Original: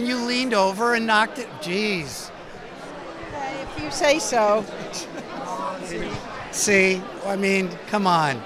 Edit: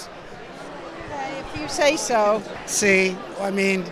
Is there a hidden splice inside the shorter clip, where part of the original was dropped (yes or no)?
yes